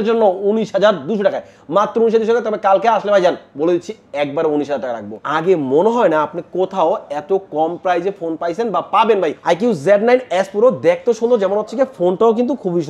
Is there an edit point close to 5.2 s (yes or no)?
yes